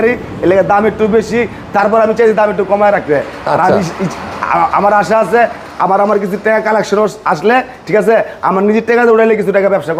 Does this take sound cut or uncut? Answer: uncut